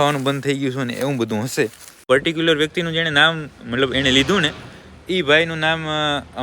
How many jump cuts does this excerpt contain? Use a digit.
1